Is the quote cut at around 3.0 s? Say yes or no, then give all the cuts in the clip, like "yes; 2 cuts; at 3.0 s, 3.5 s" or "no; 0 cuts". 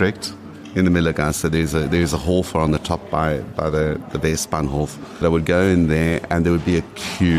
no; 1 cut; at 5.2 s